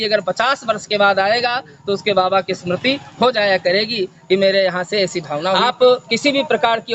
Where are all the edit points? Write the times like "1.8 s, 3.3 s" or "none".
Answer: 5.5 s